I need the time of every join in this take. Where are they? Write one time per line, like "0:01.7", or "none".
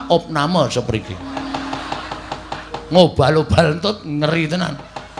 none